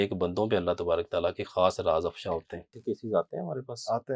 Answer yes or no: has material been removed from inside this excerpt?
yes